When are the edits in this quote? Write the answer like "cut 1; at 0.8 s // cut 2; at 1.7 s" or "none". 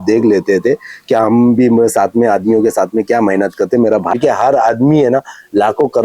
cut 1; at 4.1 s